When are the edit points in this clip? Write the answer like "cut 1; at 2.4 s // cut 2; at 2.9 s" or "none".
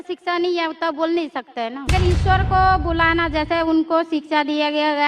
cut 1; at 1.9 s